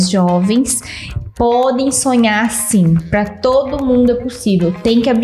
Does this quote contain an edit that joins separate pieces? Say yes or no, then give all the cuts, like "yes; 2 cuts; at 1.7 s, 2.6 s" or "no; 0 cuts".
no; 0 cuts